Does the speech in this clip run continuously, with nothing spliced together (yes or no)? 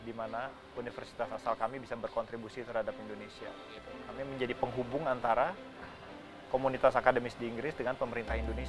no